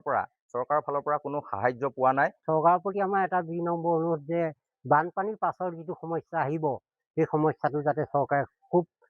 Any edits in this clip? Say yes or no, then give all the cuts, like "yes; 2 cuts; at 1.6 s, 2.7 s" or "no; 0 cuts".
yes; 1 cut; at 2.4 s